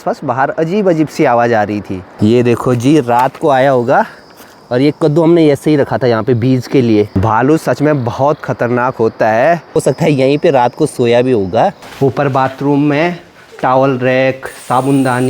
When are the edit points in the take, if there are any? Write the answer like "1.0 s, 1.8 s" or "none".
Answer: 2.1 s, 7.1 s, 9.8 s, 11.8 s